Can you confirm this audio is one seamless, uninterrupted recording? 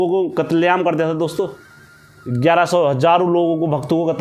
yes; 0 cuts

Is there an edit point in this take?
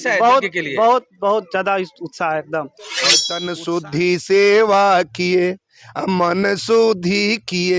yes; 1 cut; at 3.3 s

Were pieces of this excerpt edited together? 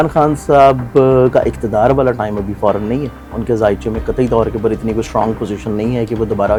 no; 0 cuts

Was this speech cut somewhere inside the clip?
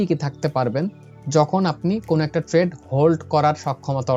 no; 0 cuts

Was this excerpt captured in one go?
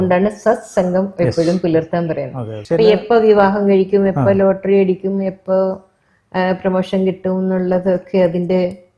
no; 1 cut; at 2.6 s

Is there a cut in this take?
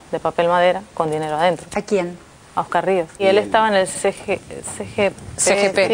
no; 0 cuts

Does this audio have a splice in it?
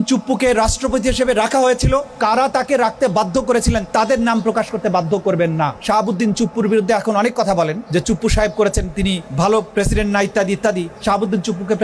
yes; 5 cuts; at 2.1 s, 3.9 s, 5.8 s, 7.8 s, 9.2 s

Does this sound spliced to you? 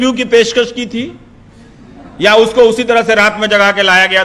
no; 0 cuts

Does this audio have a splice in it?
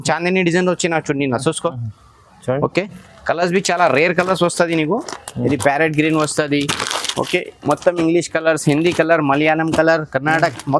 no; 0 cuts

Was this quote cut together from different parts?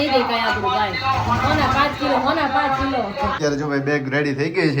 yes; 1 cut; at 3.4 s

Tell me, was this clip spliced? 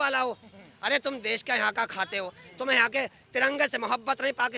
no; 0 cuts

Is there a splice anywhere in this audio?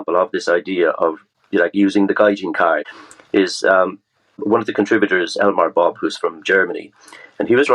yes; 3 cuts; at 1.3 s, 3.0 s, 4.4 s

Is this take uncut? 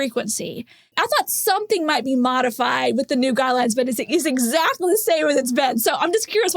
no; 1 cut; at 0.9 s

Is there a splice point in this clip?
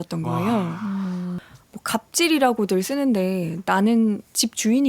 yes; 1 cut; at 1.4 s

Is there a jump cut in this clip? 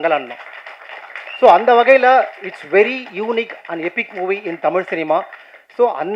no; 0 cuts

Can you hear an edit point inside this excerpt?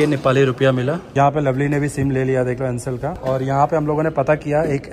yes; 2 cuts; at 1.1 s, 3.1 s

